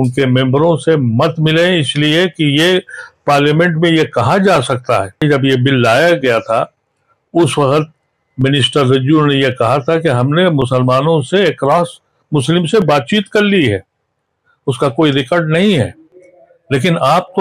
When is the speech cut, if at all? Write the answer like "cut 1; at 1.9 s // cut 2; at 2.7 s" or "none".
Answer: cut 1; at 5.2 s